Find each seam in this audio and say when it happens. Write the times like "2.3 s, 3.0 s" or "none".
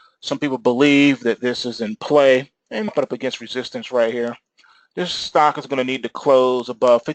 none